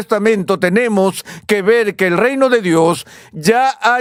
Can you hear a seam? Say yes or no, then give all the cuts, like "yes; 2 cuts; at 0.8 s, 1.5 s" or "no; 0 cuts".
no; 0 cuts